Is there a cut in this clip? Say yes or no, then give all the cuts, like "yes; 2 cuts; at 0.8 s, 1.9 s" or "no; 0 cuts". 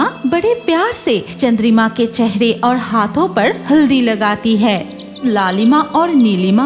yes; 1 cut; at 5.2 s